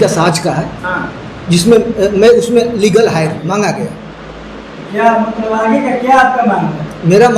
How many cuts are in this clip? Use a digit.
1